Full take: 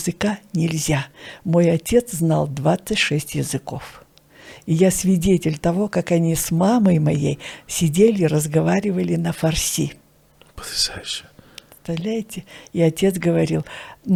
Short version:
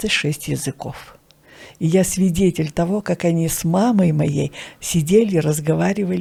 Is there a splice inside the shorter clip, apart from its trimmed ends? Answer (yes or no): no